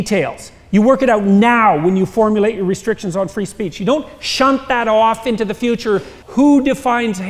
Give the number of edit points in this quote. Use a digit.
1